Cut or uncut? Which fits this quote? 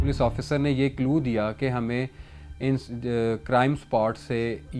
uncut